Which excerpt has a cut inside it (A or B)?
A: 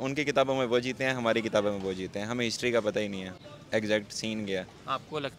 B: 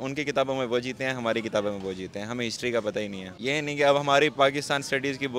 B